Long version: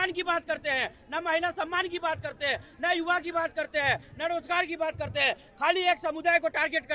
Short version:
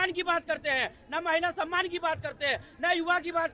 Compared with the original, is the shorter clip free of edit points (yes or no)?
yes